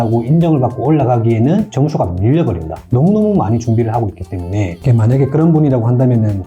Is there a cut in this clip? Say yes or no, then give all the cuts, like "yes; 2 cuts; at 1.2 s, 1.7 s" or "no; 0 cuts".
yes; 1 cut; at 4.8 s